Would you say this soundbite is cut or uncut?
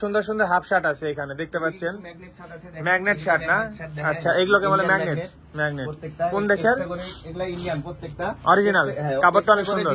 uncut